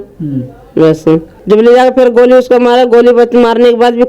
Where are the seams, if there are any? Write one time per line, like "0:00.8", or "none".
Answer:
0:01.3